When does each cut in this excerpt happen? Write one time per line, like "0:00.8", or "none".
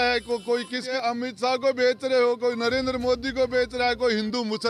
0:00.9